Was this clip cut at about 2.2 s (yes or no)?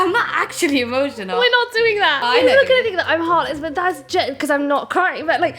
yes